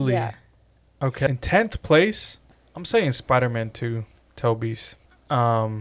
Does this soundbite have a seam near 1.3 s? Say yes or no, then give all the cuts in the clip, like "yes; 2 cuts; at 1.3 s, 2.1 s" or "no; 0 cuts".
yes; 1 cut; at 1.3 s